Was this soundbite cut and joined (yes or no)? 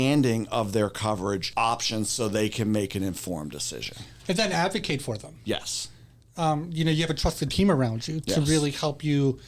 yes